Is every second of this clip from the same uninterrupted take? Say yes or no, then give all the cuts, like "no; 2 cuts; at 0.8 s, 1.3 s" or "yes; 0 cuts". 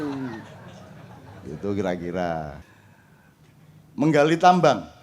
no; 1 cut; at 2.7 s